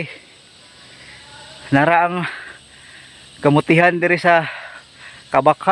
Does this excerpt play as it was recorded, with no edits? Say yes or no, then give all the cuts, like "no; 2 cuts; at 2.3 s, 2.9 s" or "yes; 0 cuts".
yes; 0 cuts